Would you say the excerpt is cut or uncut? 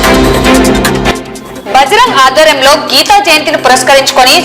cut